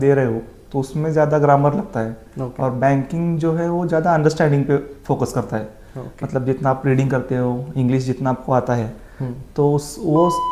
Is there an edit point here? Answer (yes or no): no